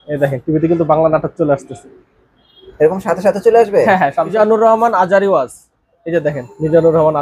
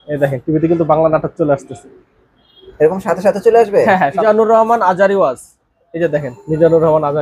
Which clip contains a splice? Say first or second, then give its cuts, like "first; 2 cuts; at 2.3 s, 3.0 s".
second; 1 cut; at 4.2 s